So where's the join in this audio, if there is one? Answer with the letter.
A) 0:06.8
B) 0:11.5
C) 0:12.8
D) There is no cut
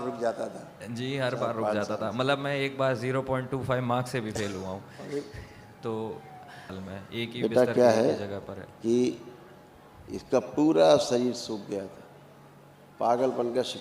A